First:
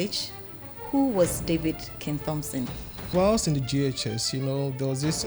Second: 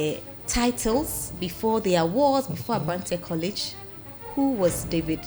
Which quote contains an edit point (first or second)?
first